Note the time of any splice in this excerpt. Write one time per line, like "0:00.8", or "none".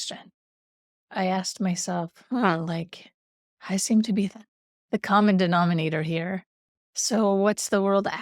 0:00.9